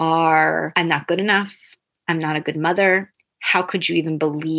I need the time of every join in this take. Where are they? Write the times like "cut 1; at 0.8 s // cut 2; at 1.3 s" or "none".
none